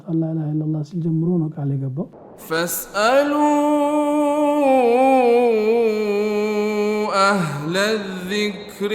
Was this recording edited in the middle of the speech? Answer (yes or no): yes